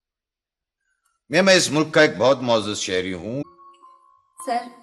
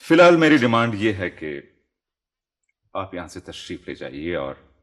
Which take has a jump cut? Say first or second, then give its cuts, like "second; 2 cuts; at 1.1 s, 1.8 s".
first; 1 cut; at 3.4 s